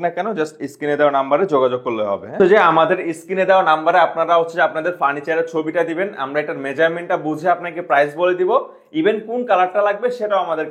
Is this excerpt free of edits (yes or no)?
no